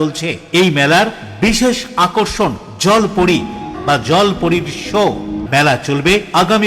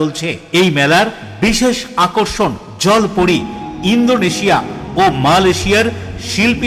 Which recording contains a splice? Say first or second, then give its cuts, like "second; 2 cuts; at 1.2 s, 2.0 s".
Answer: first; 2 cuts; at 3.7 s, 5.4 s